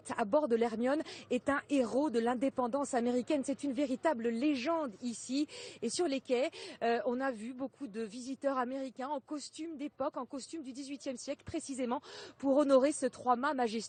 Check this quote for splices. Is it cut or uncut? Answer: uncut